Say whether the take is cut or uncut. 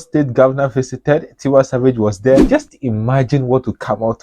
cut